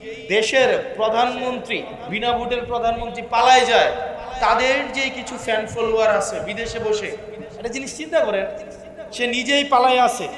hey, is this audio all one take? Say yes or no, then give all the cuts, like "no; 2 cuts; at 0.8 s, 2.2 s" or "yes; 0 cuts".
no; 1 cut; at 2.0 s